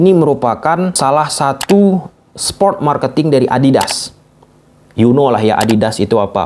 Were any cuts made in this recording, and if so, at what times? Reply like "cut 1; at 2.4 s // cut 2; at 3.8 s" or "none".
cut 1; at 0.9 s